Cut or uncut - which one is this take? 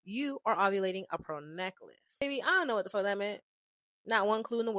cut